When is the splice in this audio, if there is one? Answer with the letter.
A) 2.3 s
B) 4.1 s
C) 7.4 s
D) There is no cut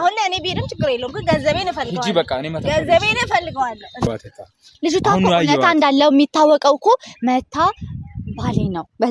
B